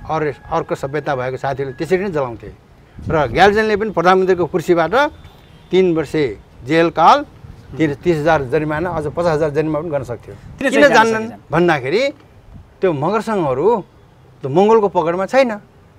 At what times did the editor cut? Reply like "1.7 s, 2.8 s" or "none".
10.4 s